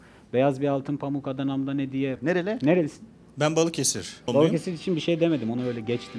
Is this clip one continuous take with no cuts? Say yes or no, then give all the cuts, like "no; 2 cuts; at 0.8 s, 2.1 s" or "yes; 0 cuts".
no; 2 cuts; at 2.1 s, 4.3 s